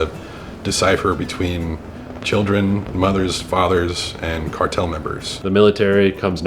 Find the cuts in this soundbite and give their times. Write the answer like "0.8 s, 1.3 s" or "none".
5.3 s

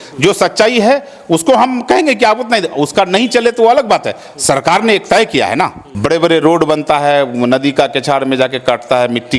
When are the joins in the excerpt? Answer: 5.8 s

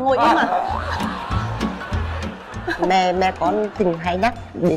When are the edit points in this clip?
none

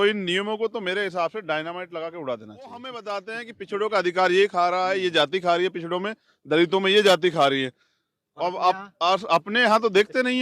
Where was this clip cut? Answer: 3.0 s

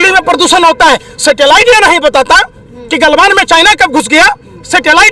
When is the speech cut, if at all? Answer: none

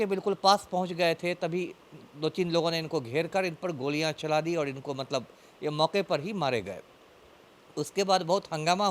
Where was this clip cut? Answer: none

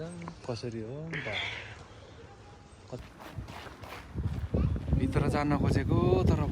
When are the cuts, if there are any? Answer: 3.1 s

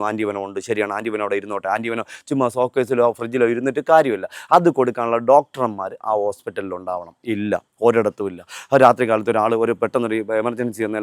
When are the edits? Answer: none

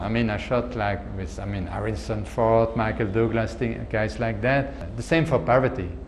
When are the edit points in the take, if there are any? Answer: 4.9 s

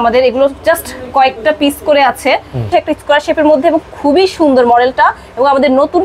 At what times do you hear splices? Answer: 2.7 s

